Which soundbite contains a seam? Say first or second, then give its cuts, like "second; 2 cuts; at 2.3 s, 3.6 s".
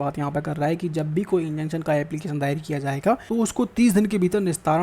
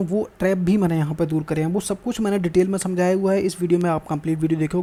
first; 1 cut; at 3.2 s